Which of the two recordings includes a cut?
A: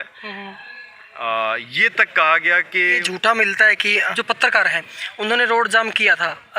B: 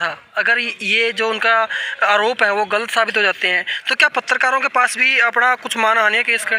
A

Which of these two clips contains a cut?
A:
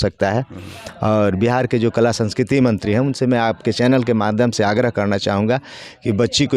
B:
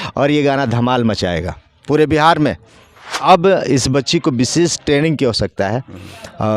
B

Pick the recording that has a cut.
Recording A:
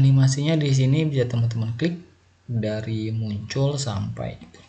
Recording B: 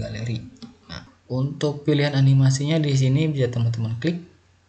B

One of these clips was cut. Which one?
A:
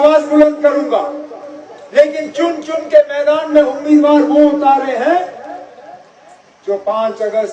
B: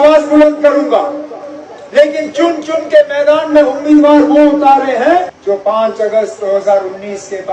B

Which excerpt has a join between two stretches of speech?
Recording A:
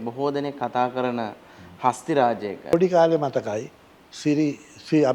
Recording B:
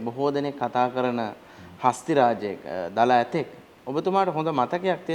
A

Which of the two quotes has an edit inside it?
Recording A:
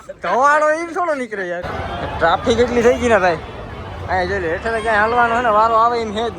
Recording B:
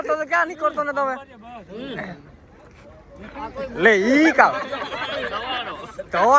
A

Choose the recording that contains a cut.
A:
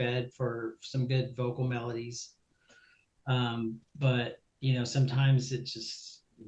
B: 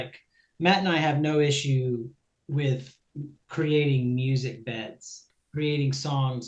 B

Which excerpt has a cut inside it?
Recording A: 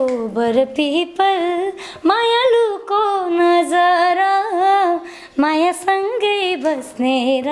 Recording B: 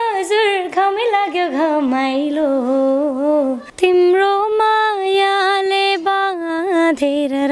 B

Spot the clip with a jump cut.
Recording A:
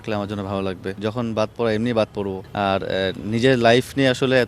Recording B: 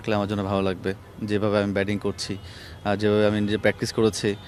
A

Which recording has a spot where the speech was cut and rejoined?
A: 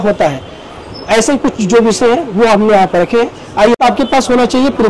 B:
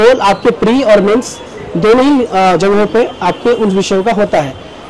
A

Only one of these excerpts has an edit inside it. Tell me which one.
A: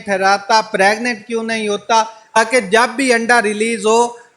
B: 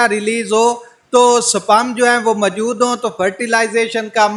A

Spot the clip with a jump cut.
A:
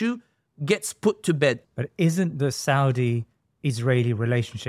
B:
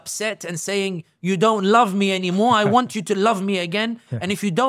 A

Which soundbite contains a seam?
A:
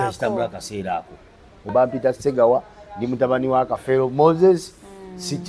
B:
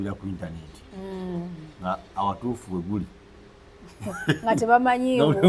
A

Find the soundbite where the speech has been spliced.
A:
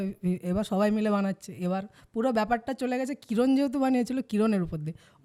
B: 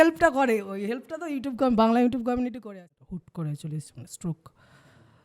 B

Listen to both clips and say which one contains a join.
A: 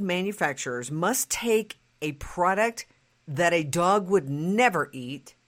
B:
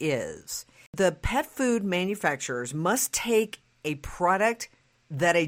B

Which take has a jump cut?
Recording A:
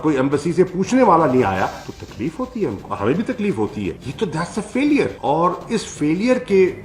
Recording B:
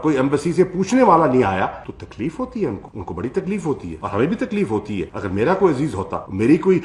A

